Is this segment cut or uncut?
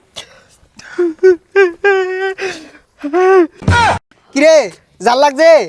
cut